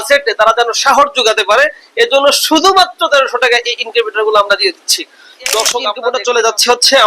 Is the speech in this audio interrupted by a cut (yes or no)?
yes